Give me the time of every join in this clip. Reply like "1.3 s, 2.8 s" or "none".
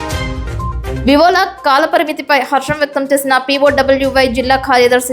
1.0 s